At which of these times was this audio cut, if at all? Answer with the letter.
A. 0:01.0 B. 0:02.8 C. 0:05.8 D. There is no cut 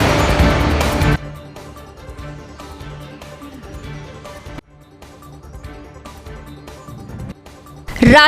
A